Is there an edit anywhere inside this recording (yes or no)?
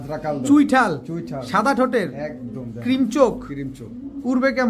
no